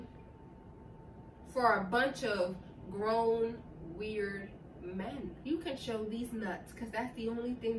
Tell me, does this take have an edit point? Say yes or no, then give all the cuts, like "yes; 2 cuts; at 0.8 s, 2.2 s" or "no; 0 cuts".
yes; 1 cut; at 5.4 s